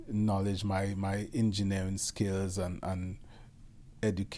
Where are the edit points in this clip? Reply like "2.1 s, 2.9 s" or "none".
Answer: none